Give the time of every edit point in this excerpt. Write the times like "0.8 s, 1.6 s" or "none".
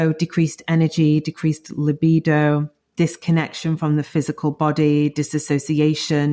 2.8 s